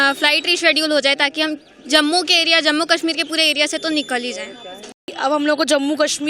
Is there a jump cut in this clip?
yes; 1 cut; at 5.1 s

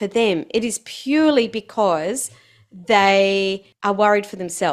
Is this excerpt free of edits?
no; 1 cut; at 3.7 s

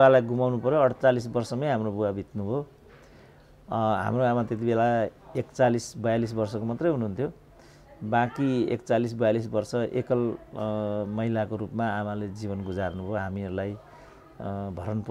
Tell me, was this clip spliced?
no; 0 cuts

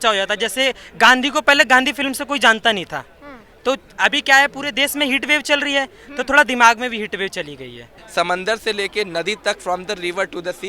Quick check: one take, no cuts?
no; 2 cuts; at 0.8 s, 7.9 s

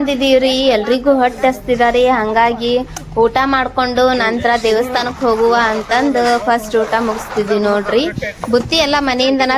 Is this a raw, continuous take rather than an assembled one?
yes; 0 cuts

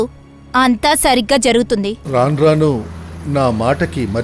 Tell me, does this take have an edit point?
yes; 1 cut; at 2.0 s

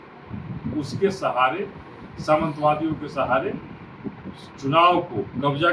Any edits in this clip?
no; 0 cuts

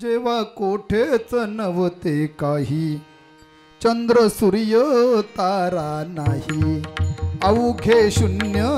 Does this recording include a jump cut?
no; 0 cuts

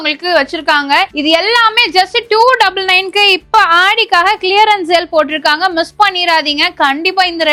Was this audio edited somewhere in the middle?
no; 0 cuts

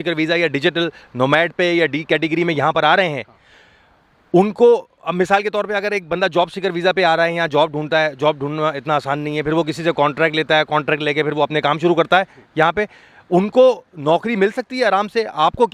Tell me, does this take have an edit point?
no; 0 cuts

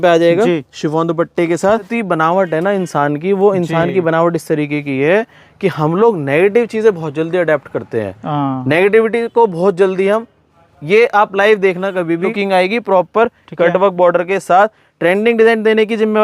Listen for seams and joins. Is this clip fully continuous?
no; 2 cuts; at 1.9 s, 12.3 s

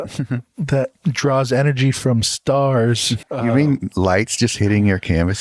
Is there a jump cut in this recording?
yes; 2 cuts; at 0.9 s, 3.1 s

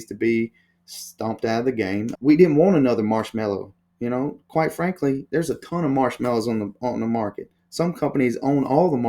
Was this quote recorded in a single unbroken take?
no; 1 cut; at 2.1 s

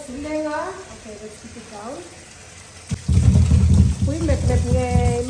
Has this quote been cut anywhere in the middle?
yes; 1 cut; at 2.9 s

